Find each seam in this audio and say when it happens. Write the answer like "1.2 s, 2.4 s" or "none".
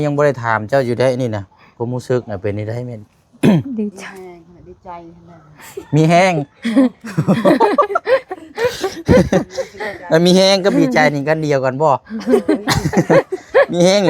none